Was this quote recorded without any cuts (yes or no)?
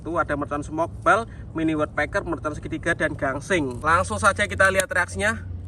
no